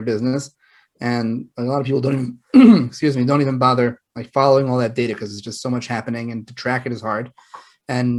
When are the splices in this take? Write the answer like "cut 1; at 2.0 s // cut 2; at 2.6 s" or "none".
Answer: none